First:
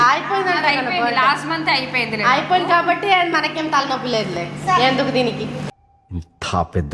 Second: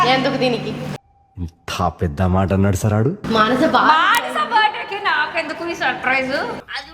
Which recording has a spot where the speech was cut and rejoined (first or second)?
second